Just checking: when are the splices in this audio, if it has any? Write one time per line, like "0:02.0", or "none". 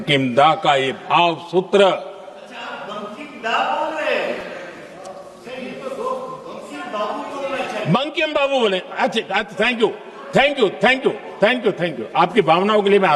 none